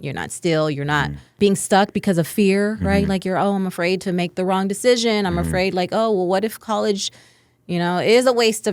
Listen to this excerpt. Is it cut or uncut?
cut